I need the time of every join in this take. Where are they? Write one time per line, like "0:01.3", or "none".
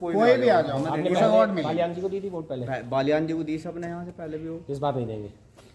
none